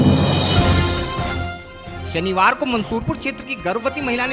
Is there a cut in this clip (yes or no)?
no